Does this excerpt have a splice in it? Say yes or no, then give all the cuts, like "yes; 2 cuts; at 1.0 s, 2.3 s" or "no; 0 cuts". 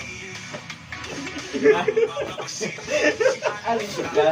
no; 0 cuts